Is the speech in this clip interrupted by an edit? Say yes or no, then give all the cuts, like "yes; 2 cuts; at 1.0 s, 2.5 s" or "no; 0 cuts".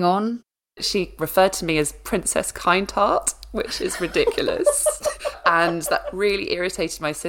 yes; 2 cuts; at 0.8 s, 5.3 s